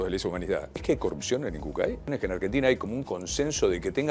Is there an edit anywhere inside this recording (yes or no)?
yes